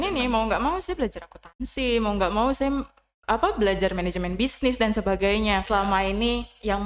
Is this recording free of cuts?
no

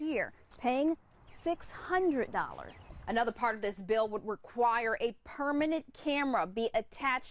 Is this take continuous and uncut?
no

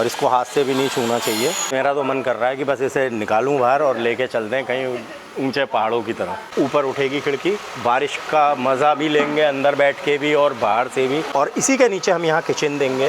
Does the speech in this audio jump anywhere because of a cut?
yes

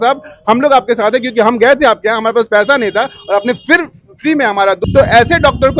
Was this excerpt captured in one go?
no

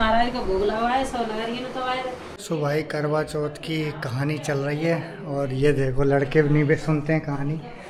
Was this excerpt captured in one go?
yes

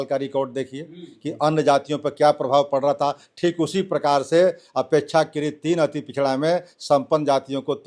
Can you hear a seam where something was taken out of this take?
no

